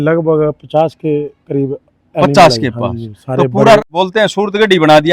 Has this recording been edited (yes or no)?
no